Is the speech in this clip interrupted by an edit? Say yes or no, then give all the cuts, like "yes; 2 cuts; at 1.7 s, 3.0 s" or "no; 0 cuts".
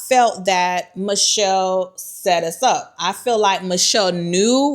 no; 0 cuts